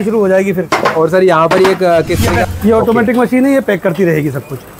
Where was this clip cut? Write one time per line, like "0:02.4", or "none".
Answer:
0:02.5